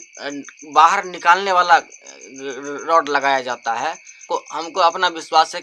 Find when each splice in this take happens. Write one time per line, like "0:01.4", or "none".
0:04.1